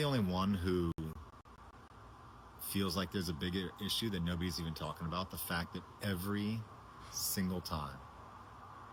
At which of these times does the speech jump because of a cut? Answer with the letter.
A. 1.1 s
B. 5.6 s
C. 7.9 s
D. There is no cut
D